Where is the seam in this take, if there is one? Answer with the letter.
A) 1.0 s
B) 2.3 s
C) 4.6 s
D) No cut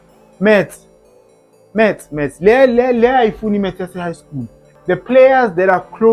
C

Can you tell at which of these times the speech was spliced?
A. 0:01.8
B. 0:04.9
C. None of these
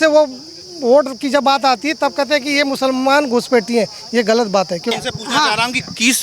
B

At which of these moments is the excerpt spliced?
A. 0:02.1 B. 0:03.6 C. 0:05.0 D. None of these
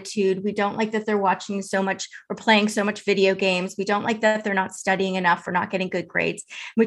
D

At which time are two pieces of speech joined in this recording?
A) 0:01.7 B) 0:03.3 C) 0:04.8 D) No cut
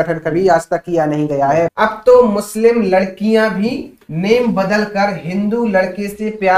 A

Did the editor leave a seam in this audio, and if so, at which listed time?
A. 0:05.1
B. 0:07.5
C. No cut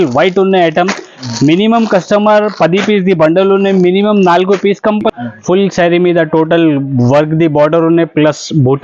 A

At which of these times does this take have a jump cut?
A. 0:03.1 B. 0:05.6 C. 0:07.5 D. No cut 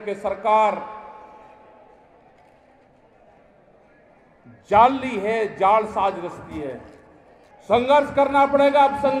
C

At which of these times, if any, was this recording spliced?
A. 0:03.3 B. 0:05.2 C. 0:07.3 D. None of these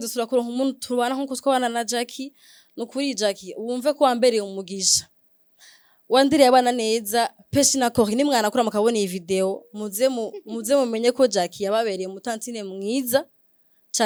D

